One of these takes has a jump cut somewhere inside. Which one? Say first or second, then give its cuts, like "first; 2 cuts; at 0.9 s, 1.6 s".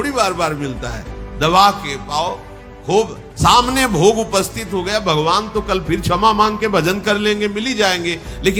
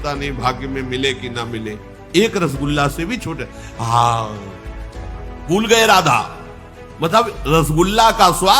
second; 1 cut; at 1.9 s